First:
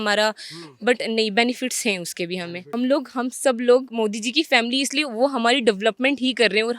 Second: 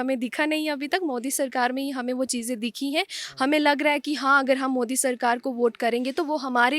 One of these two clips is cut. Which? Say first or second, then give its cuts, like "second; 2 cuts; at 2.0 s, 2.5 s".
first; 1 cut; at 2.8 s